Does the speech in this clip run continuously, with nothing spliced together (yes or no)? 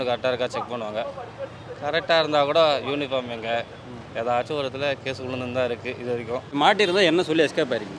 yes